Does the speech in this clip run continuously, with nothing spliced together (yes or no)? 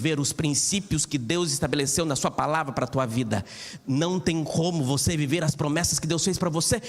yes